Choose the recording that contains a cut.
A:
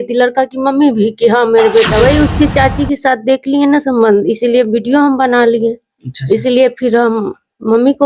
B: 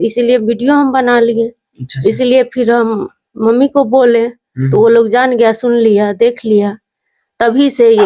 A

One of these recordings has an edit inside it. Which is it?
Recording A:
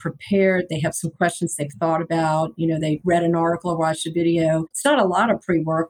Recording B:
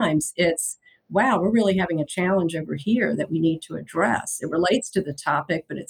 A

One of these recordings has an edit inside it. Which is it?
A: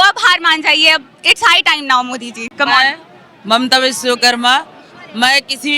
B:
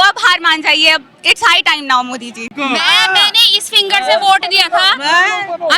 B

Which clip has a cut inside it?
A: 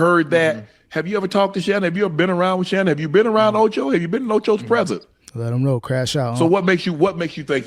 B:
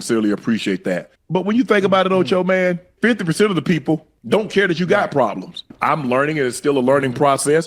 B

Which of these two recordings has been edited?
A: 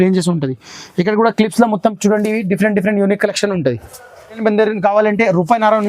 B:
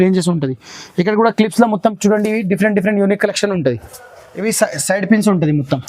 A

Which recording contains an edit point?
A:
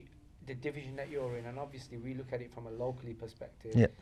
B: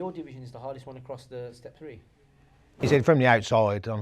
B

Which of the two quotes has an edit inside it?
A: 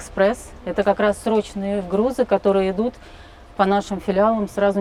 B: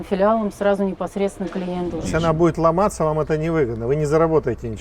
B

